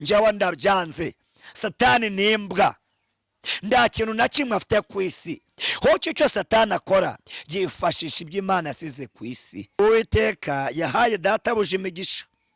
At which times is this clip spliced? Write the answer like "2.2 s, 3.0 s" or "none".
9.8 s